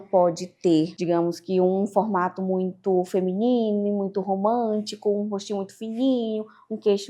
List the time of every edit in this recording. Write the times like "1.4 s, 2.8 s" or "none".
1.0 s